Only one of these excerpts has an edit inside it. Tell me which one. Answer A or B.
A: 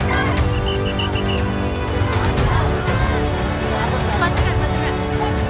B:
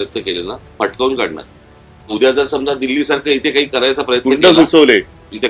B